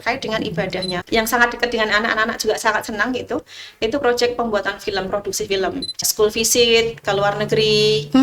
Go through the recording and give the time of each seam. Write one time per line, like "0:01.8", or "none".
0:01.0
0:06.0